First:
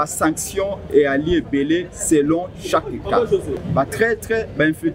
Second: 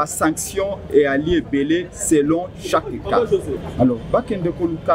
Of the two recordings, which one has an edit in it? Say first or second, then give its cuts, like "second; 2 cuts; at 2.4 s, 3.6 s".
first; 1 cut; at 3.6 s